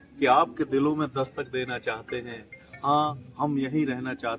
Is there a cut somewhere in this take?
no; 0 cuts

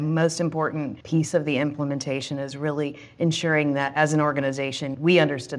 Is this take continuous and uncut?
no; 1 cut; at 1.0 s

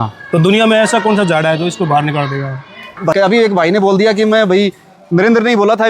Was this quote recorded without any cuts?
no; 1 cut; at 3.1 s

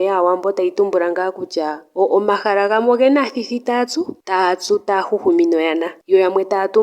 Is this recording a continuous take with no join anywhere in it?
yes; 0 cuts

